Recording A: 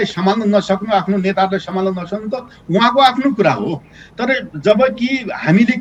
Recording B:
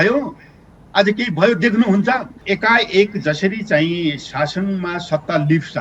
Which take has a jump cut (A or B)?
B